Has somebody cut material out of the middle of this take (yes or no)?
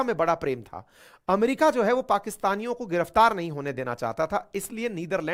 no